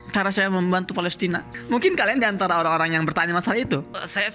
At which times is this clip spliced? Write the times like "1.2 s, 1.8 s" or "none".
1.5 s